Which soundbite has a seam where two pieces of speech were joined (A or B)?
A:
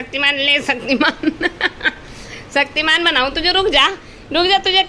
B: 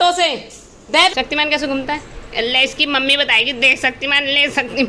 B